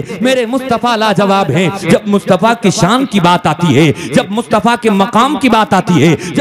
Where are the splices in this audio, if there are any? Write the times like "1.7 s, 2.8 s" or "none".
1.8 s